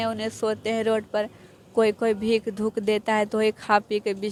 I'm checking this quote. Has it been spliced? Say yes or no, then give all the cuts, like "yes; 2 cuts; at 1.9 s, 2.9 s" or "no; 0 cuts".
no; 0 cuts